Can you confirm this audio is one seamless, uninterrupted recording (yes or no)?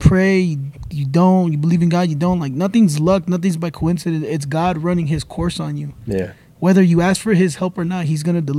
yes